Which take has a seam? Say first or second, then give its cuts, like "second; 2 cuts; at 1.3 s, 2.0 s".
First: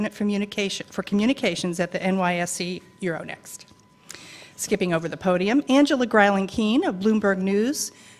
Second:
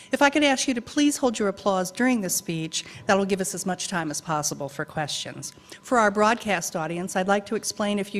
first; 1 cut; at 5.0 s